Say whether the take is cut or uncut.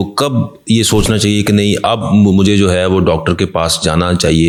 uncut